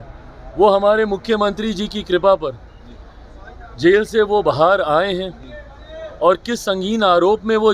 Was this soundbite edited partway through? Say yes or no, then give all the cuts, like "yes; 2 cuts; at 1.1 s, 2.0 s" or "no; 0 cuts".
no; 0 cuts